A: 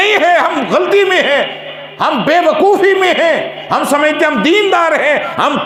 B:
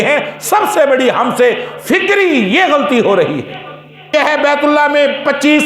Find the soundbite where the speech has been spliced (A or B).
B